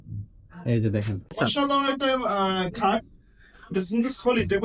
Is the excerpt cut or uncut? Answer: cut